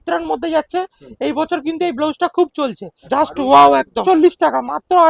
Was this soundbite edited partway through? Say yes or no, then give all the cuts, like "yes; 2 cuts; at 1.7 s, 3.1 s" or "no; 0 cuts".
yes; 2 cuts; at 2.9 s, 4.0 s